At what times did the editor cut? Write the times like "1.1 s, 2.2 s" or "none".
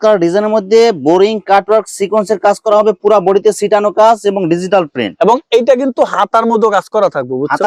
none